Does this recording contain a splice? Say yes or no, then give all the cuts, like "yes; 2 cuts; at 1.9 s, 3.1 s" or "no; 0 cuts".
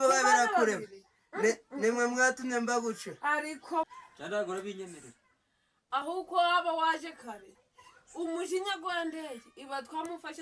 yes; 1 cut; at 3.9 s